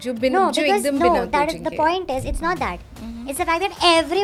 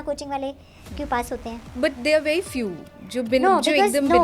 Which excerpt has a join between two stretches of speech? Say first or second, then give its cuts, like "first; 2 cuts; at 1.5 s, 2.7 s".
second; 1 cut; at 1.7 s